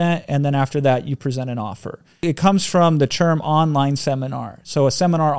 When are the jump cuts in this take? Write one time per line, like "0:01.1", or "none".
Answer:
0:02.2